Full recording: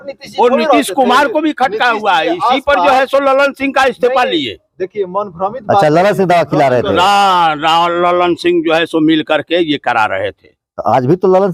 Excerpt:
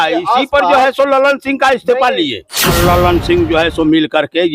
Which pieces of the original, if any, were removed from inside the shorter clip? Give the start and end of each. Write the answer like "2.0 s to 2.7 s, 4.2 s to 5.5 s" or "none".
4.9 s to 7.9 s